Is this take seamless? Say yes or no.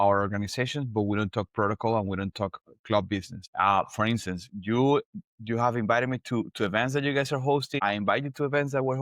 no